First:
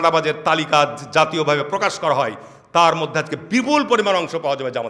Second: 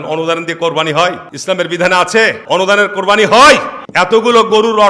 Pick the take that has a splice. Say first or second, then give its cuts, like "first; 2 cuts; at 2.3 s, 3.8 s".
second; 3 cuts; at 1.3 s, 2.4 s, 3.8 s